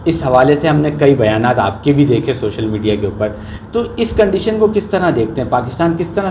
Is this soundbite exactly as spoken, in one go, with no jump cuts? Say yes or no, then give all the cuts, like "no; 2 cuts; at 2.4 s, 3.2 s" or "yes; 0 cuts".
yes; 0 cuts